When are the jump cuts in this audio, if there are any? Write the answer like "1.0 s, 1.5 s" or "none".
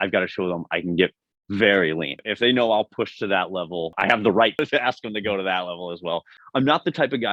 2.1 s, 3.9 s, 4.6 s, 6.3 s